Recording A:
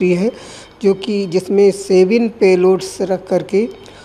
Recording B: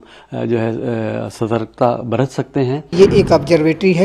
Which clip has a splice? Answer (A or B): B